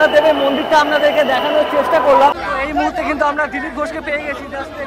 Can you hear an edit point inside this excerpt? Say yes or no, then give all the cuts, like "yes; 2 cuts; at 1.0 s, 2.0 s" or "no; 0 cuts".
yes; 1 cut; at 2.4 s